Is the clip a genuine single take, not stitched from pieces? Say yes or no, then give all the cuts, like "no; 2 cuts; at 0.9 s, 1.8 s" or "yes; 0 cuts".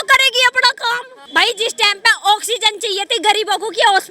no; 1 cut; at 1.1 s